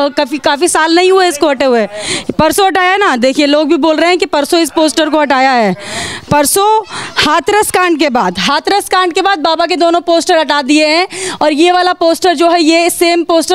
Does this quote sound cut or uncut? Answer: uncut